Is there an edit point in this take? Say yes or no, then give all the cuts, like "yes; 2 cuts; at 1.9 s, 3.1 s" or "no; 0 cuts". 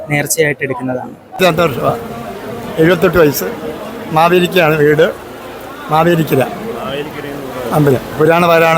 yes; 1 cut; at 1.4 s